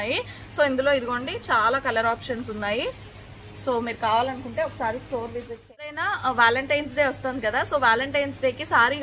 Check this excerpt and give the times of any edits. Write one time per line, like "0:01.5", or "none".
0:06.0

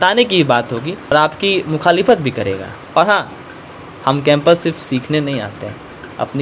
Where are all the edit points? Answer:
0:01.1
0:02.8

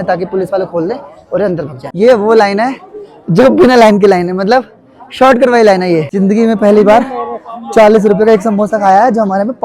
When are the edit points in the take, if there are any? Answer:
0:01.8
0:06.1

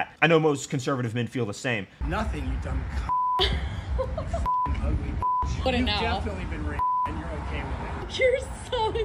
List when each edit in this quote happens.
0:01.9

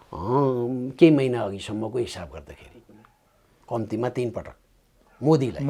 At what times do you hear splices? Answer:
none

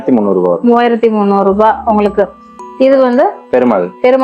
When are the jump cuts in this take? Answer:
none

